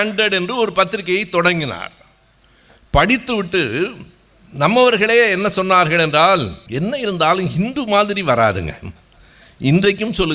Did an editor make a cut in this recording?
yes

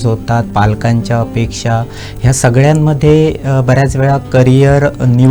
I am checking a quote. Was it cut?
no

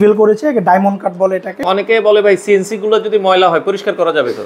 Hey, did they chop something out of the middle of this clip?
yes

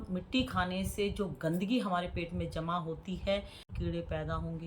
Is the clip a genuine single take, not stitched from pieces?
no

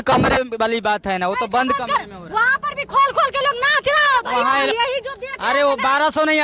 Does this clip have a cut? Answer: yes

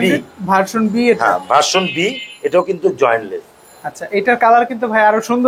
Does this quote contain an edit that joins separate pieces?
no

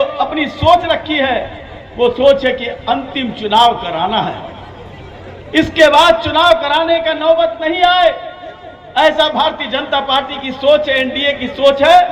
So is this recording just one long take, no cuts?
yes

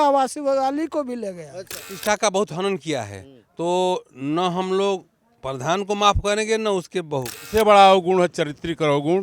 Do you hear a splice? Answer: yes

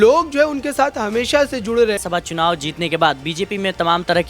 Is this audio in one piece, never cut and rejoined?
no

